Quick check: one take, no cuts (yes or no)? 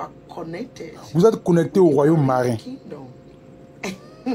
no